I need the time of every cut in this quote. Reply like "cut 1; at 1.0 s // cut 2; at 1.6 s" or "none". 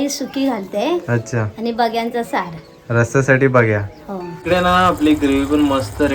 cut 1; at 4.4 s